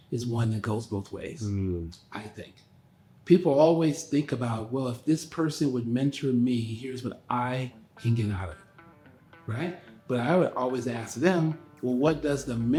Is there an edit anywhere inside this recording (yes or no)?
no